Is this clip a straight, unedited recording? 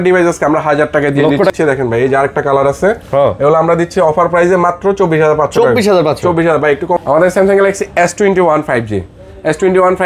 no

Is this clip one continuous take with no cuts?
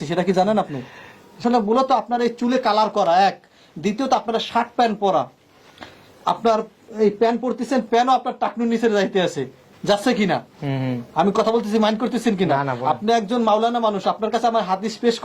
no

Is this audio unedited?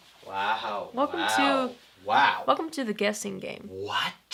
yes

